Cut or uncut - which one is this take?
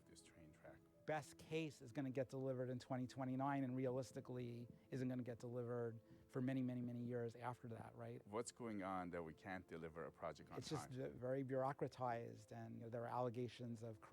cut